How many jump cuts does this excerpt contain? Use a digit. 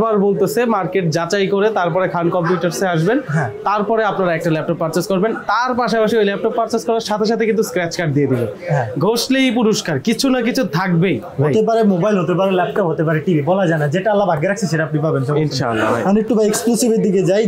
0